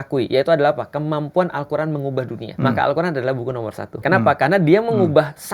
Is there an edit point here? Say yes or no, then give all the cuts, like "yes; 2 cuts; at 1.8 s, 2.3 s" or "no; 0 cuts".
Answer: yes; 2 cuts; at 2.4 s, 4.0 s